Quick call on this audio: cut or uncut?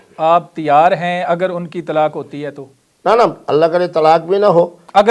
uncut